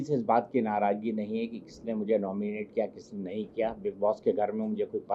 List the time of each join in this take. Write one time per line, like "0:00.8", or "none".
none